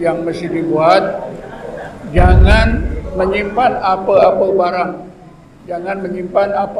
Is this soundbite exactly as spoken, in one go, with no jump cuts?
yes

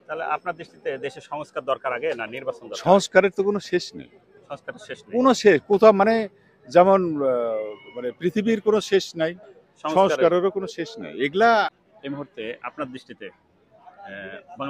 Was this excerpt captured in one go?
no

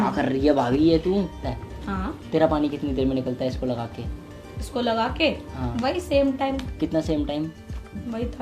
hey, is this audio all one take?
no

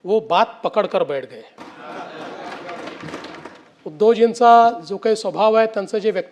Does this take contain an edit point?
yes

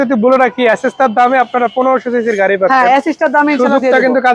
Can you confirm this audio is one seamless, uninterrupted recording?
yes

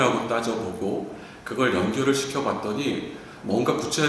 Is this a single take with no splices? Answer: yes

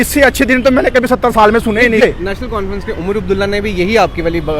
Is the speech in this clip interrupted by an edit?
yes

